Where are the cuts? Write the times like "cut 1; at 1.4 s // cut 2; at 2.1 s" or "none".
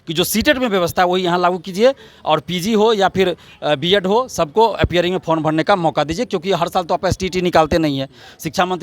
none